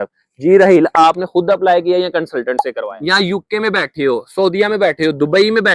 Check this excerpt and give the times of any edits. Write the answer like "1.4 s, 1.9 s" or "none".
2.8 s